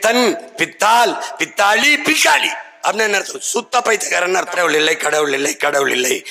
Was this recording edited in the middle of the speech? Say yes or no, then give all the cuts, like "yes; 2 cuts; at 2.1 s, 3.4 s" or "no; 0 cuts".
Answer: yes; 1 cut; at 4.6 s